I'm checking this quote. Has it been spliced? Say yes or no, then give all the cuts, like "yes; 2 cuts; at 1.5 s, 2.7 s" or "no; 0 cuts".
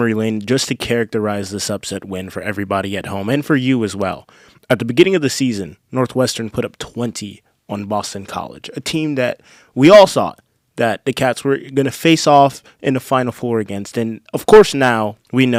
no; 0 cuts